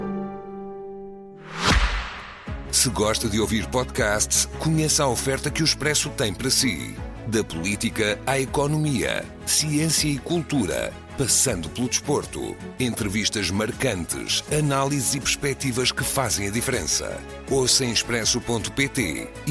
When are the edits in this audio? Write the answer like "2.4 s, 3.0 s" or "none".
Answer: 1.4 s